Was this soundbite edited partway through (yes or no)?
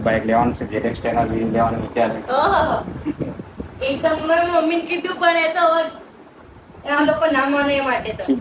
no